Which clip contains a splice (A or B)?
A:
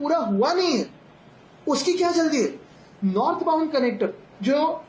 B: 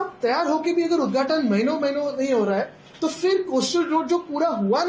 A